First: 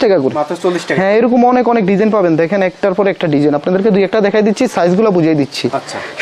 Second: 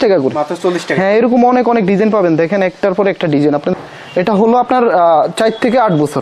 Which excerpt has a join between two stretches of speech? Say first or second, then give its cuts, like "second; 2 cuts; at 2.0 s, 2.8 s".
second; 1 cut; at 3.7 s